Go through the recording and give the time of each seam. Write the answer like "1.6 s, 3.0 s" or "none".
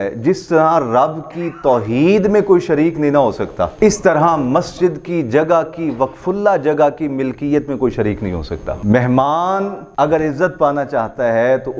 3.7 s, 8.8 s, 9.8 s